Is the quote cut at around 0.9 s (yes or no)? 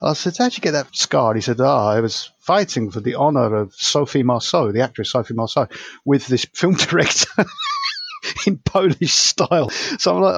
yes